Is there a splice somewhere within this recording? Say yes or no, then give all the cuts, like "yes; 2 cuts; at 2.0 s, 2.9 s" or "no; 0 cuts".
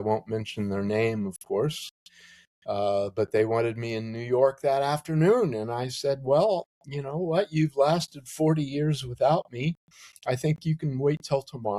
no; 0 cuts